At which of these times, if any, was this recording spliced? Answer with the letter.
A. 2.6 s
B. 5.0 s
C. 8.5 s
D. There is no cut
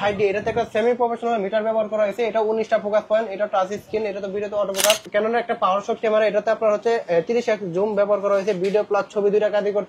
B